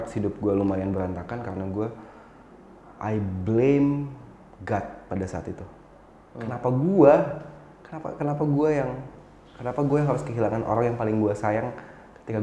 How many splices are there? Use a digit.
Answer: 0